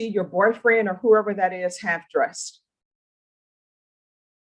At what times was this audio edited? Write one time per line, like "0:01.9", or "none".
none